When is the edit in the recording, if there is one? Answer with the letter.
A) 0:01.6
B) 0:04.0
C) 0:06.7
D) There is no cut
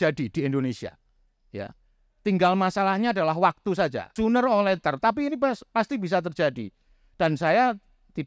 B